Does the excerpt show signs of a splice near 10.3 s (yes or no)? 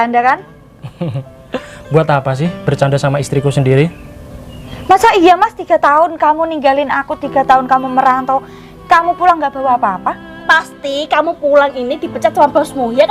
yes